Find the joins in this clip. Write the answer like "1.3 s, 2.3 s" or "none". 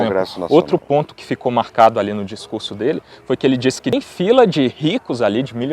3.9 s